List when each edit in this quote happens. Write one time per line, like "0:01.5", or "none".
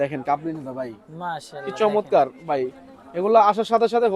none